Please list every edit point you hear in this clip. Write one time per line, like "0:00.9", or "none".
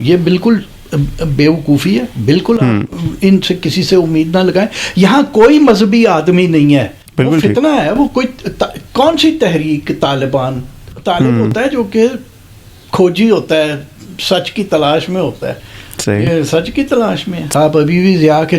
0:07.0
0:17.5